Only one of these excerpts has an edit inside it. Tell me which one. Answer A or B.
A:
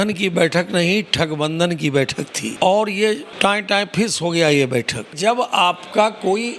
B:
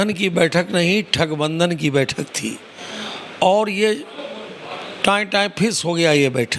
A